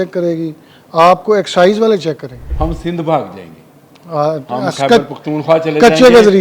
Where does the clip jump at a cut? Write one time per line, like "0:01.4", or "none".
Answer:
0:02.4

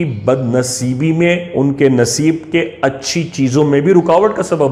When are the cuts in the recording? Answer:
none

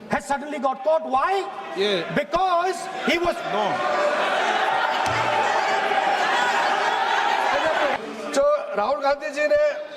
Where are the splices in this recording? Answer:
0:08.0

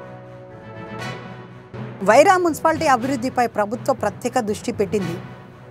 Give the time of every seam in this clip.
0:00.9

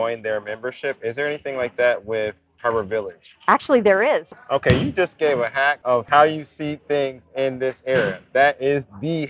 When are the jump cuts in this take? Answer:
0:02.5
0:04.3
0:06.0

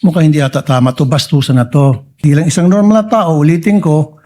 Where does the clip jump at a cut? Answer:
0:02.1

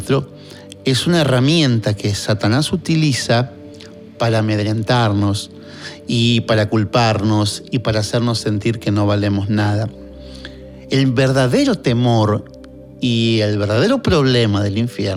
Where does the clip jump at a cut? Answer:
none

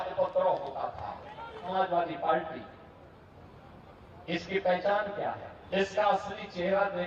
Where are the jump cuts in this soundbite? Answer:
0:01.7
0:05.5

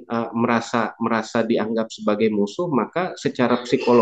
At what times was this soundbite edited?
none

